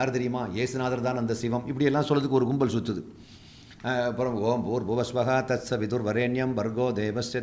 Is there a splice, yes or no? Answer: no